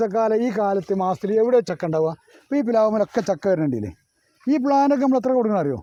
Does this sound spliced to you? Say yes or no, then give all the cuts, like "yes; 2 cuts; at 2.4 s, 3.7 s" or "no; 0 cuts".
no; 0 cuts